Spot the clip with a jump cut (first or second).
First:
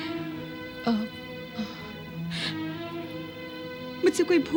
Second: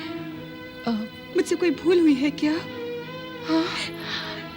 second